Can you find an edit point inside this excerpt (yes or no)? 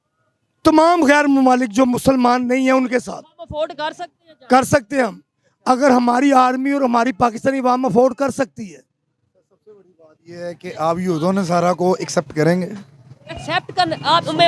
no